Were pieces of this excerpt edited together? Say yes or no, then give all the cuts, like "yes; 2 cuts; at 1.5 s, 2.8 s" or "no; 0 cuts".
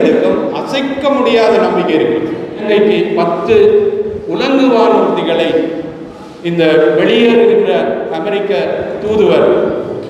yes; 1 cut; at 2.6 s